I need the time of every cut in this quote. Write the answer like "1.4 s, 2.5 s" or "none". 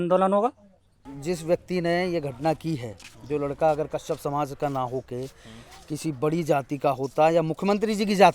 1.1 s